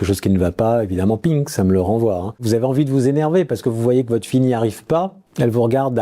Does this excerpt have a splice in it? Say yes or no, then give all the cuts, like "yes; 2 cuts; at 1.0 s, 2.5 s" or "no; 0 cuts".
yes; 1 cut; at 2.4 s